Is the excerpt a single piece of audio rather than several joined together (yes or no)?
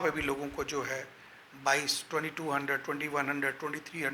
yes